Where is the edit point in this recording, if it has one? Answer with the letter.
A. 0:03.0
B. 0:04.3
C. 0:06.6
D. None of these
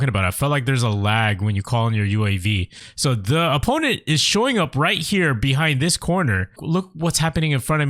C